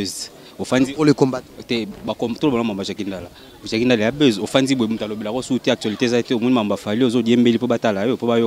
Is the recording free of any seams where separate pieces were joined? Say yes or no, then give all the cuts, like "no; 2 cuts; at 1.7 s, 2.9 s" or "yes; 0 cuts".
yes; 0 cuts